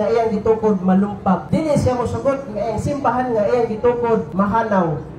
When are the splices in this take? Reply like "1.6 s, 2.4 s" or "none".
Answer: 1.4 s, 4.3 s